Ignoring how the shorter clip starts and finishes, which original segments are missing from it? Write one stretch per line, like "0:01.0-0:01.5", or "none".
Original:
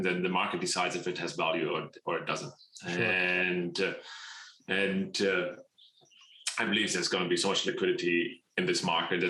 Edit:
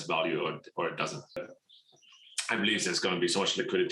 0:02.7-0:05.5